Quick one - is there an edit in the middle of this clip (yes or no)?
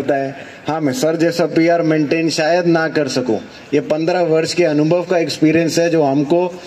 no